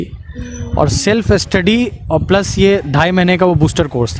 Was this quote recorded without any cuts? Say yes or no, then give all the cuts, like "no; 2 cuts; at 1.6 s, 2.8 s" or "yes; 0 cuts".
yes; 0 cuts